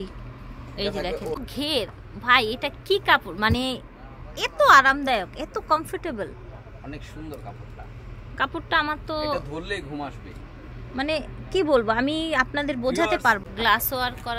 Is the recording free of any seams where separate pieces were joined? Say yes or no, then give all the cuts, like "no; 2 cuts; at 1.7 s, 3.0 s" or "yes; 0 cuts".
no; 2 cuts; at 1.4 s, 13.4 s